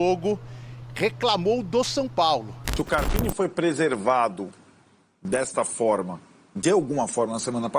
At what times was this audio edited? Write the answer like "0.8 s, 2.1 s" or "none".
2.7 s